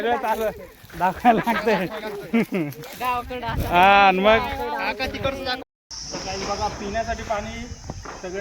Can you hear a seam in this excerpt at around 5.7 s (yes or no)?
yes